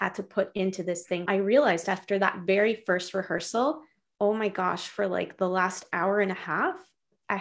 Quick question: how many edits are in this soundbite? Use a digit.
1